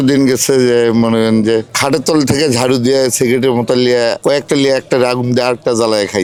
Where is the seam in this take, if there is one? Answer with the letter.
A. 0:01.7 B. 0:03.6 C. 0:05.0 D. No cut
D